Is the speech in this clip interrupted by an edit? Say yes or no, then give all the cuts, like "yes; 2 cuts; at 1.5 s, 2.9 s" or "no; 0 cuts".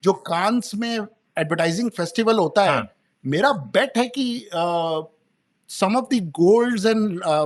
no; 0 cuts